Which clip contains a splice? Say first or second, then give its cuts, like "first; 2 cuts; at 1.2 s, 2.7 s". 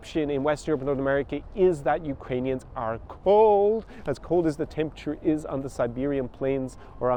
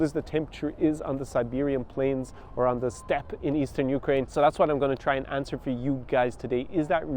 second; 1 cut; at 4.3 s